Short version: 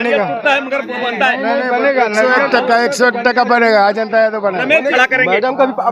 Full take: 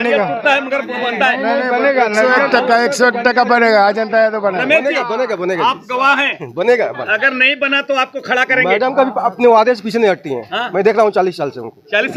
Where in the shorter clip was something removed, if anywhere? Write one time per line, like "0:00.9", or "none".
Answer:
0:04.9